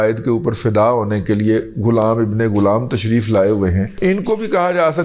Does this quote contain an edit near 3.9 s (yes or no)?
yes